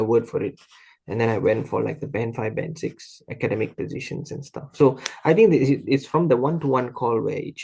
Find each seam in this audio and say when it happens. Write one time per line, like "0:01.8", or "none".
none